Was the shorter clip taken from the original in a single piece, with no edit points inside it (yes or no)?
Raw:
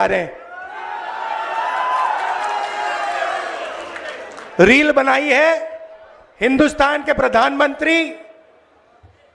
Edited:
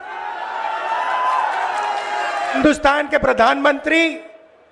no